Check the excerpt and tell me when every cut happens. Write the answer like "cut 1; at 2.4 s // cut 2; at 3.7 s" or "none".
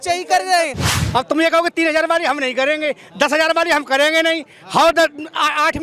cut 1; at 0.9 s